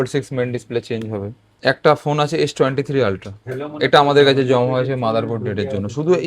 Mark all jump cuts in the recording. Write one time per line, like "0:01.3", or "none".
0:01.4